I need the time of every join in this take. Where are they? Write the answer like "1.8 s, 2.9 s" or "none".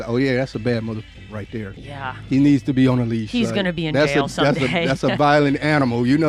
none